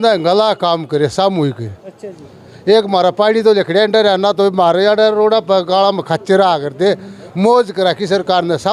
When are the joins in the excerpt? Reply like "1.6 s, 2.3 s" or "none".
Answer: none